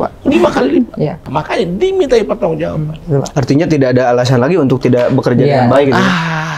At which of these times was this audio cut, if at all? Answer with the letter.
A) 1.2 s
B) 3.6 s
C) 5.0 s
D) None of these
A